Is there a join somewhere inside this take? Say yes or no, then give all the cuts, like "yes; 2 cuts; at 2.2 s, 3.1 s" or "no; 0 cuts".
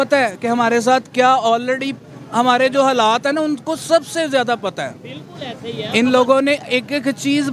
no; 0 cuts